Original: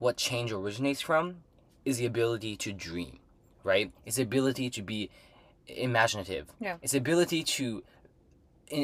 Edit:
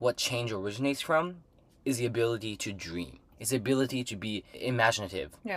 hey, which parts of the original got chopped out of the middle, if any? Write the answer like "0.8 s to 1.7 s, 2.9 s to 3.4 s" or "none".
3.3 s to 4.0 s, 5.1 s to 5.6 s